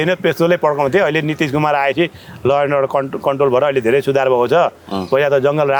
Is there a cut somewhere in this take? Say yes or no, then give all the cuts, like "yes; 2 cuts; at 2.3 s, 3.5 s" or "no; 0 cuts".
no; 0 cuts